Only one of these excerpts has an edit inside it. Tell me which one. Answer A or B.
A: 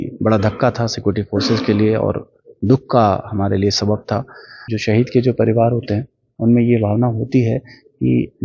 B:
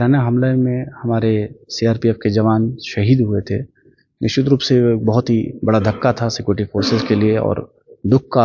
A